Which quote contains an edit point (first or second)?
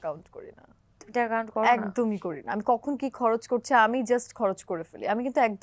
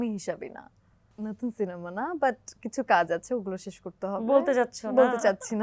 second